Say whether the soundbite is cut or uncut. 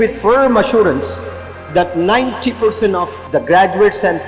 cut